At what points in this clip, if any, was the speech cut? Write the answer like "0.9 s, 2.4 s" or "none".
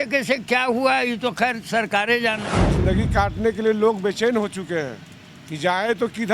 2.6 s